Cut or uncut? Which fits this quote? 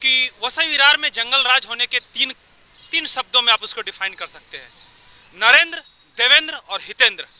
uncut